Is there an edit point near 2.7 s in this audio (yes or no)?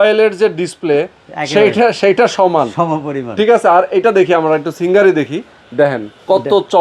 no